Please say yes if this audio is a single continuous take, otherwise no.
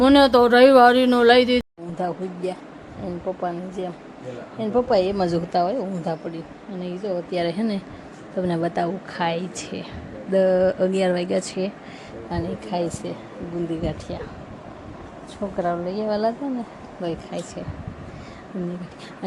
no